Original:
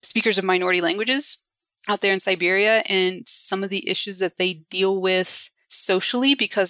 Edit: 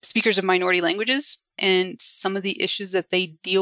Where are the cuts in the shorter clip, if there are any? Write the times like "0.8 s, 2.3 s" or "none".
1.6 s

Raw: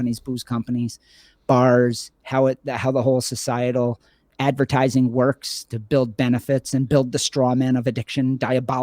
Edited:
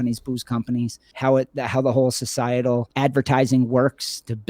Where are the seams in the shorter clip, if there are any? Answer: 1.0 s, 2.9 s

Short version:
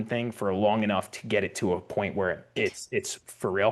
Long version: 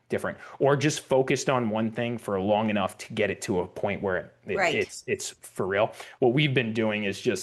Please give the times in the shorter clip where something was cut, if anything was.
2.6 s

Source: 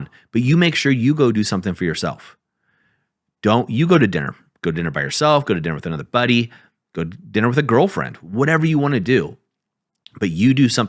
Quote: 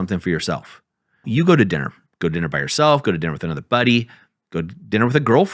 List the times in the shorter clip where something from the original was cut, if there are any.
1.3 s

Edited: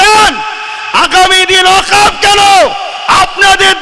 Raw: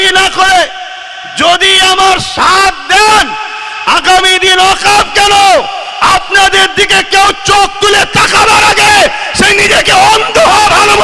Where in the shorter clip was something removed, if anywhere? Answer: none

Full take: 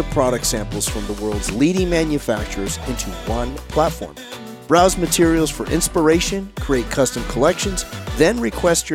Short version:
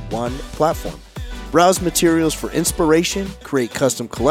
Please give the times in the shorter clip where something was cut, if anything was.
none

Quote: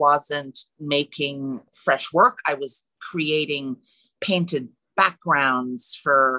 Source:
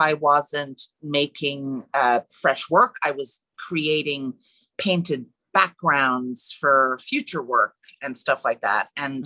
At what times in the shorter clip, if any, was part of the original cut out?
1.7 s

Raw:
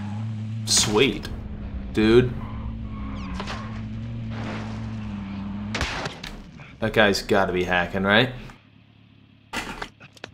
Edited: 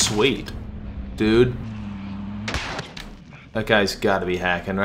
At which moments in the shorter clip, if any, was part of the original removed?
1.6 s

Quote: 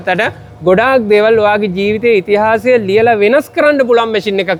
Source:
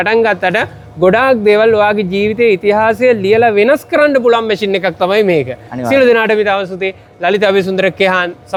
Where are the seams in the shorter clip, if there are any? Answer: none

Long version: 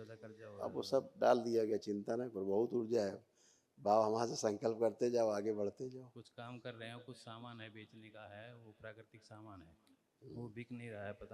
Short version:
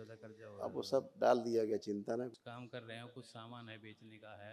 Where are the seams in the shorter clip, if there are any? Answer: 2.3 s

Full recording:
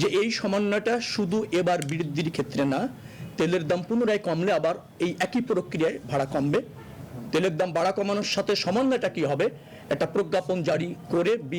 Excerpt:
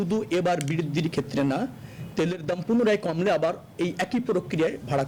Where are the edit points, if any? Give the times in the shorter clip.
none

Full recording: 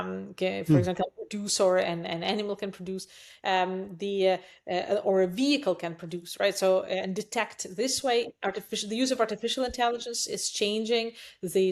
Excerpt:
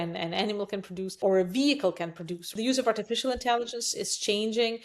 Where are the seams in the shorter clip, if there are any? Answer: 1.2 s, 2.4 s

